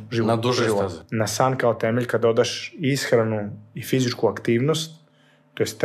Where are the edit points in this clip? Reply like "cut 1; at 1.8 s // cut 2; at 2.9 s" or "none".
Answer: cut 1; at 1.0 s